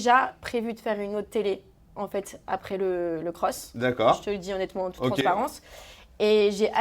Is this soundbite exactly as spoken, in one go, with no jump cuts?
yes; 0 cuts

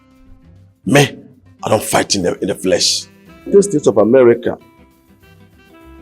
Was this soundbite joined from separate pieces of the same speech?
yes; 1 cut; at 3.5 s

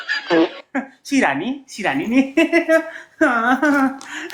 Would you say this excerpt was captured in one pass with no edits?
yes; 0 cuts

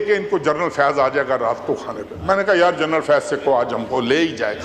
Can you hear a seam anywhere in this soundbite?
no; 0 cuts

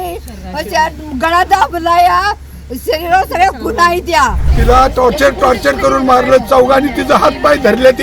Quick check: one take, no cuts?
no; 1 cut; at 4.5 s

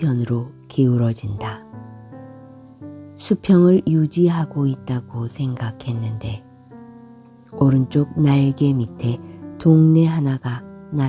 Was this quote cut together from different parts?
yes; 2 cuts; at 6.2 s, 7.6 s

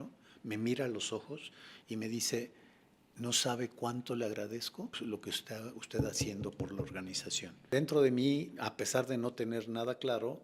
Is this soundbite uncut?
no; 2 cuts; at 5.0 s, 7.7 s

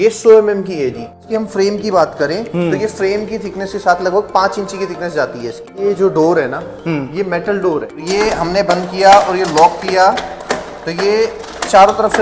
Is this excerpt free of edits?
no; 3 cuts; at 1.2 s, 5.7 s, 8.0 s

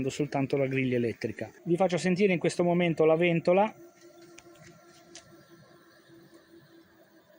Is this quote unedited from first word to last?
no; 1 cut; at 1.5 s

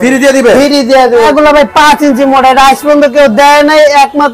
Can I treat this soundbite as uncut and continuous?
no; 1 cut; at 1.3 s

